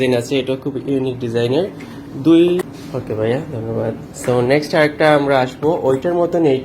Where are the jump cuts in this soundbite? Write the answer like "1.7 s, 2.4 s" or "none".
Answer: 2.6 s